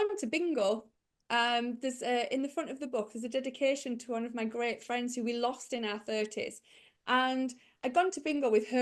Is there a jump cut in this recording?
no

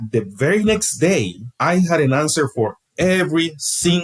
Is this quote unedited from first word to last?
no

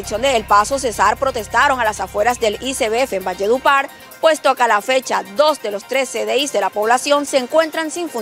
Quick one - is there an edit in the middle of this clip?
no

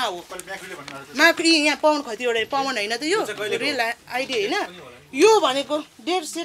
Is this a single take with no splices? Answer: yes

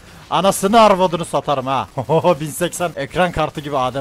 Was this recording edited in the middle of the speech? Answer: yes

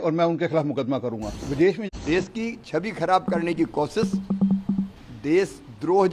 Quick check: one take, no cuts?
no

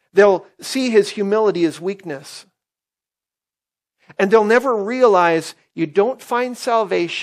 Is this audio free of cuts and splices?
yes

